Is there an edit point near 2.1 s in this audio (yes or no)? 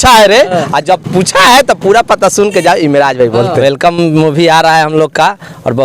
no